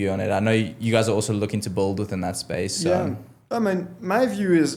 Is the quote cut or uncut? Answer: uncut